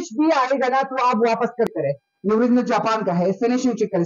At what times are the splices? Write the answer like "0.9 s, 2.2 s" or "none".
1.8 s